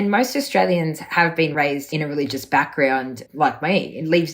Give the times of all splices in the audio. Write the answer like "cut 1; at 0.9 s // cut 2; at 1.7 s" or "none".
cut 1; at 1.5 s // cut 2; at 3.2 s